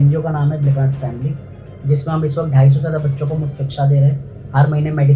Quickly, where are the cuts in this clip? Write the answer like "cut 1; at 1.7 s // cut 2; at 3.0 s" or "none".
none